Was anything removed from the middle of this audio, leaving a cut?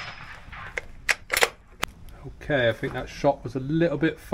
yes; 1 cut; at 1.6 s

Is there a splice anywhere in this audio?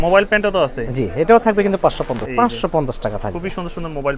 yes; 1 cut; at 2.2 s

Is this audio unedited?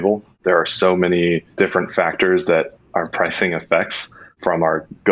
no; 1 cut; at 1.5 s

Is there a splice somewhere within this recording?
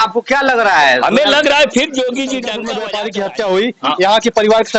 yes; 1 cut; at 2.6 s

